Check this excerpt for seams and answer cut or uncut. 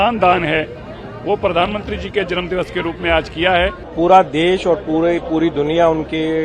cut